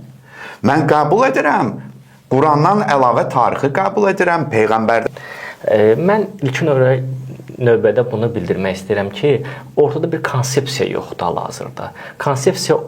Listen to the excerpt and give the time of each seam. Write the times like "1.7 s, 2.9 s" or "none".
5.0 s